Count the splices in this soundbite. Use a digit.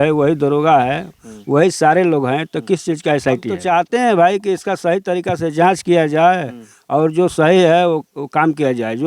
1